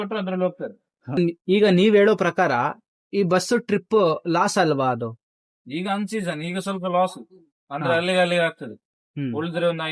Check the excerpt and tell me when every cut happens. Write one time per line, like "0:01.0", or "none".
0:01.3